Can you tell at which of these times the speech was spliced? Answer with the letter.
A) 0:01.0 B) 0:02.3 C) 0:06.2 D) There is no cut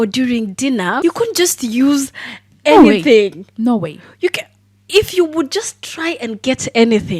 A